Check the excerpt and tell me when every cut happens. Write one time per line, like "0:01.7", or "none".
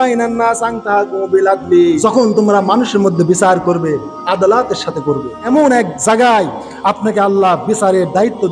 0:02.0
0:05.5